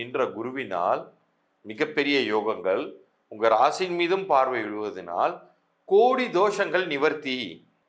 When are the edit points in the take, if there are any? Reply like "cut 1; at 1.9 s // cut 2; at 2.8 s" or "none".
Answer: none